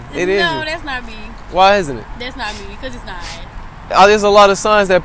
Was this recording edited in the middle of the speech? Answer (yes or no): no